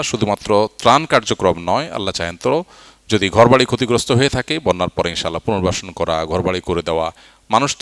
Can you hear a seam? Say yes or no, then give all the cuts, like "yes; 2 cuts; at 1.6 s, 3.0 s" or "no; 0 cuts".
no; 0 cuts